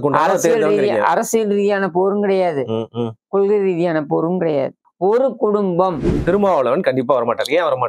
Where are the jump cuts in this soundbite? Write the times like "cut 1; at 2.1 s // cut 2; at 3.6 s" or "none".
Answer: cut 1; at 4.8 s // cut 2; at 6.2 s